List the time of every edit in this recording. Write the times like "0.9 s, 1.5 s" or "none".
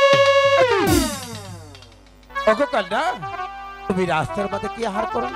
2.3 s, 3.9 s